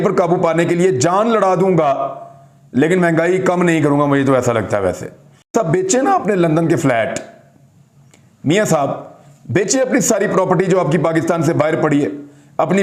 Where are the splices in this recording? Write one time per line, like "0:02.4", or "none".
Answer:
none